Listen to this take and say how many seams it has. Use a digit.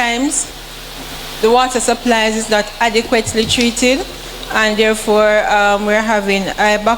1